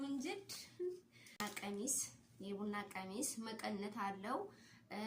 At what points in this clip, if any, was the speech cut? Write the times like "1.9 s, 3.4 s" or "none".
1.4 s